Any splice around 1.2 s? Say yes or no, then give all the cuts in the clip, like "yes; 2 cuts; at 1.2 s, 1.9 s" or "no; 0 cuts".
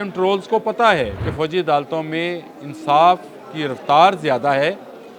yes; 1 cut; at 1.2 s